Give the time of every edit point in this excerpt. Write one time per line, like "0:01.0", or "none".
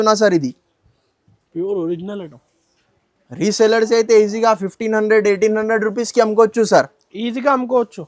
none

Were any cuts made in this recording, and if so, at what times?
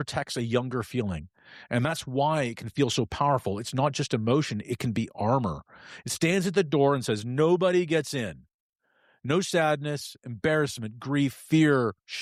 none

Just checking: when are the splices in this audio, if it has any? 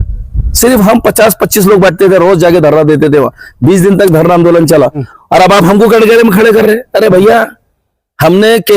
0:05.1

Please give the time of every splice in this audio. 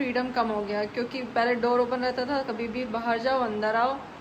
none

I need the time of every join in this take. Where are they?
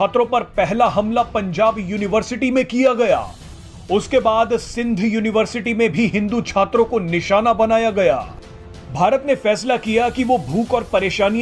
0:08.3

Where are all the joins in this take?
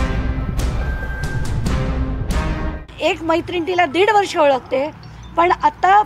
0:02.9

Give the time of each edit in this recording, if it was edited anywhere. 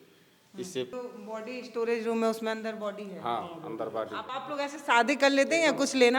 0:00.9
0:04.3

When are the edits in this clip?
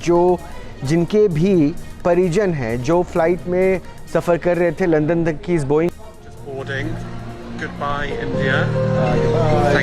0:06.0

